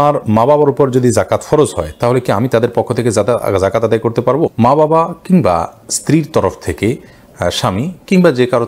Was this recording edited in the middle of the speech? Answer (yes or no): no